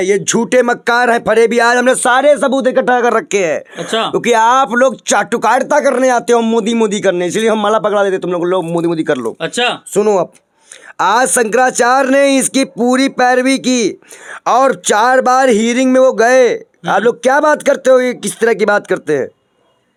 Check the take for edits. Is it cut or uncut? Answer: uncut